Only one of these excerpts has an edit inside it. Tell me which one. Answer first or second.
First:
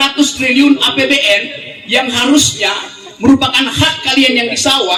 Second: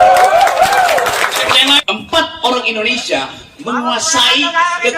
second